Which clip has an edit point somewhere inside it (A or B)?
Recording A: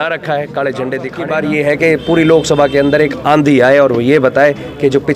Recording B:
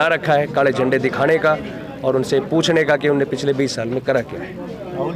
A